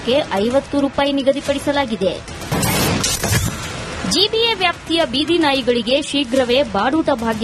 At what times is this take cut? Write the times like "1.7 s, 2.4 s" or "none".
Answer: none